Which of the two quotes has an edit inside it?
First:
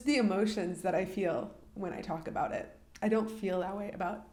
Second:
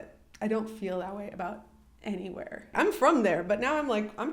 second; 1 cut; at 2.7 s

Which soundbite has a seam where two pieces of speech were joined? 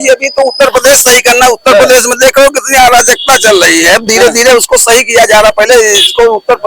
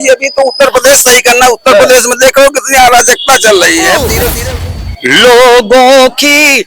second; 1 cut; at 4.3 s

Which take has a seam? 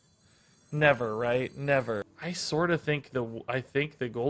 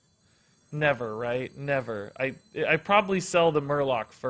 first; 1 cut; at 2.1 s

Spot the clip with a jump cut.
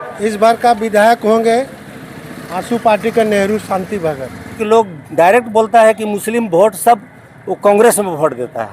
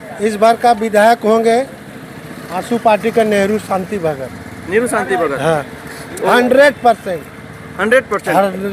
first; 1 cut; at 4.5 s

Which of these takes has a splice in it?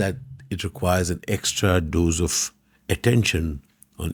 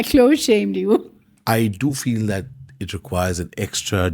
second; 1 cut; at 1.0 s

